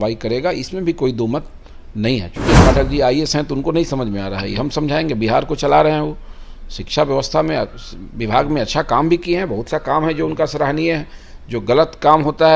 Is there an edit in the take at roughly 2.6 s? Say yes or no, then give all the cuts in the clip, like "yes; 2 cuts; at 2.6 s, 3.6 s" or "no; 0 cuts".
yes; 1 cut; at 2.6 s